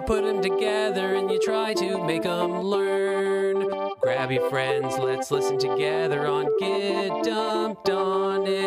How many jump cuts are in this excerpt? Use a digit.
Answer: 0